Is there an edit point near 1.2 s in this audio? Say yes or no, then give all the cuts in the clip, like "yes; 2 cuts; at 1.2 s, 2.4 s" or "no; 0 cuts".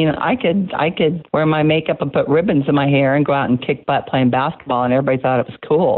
yes; 1 cut; at 1.2 s